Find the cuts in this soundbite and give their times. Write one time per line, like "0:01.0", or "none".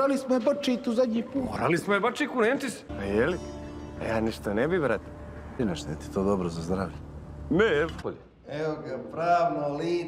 none